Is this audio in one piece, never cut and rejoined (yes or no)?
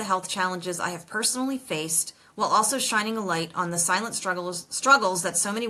yes